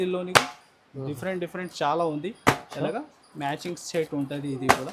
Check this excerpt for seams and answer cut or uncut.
uncut